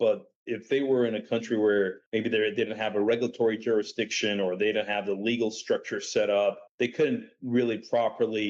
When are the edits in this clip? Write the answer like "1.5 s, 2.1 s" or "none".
2.0 s, 6.7 s